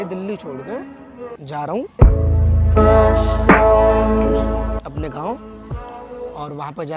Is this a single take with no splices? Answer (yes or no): yes